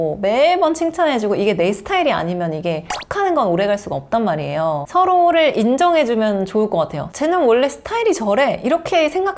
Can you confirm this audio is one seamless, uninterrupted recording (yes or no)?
yes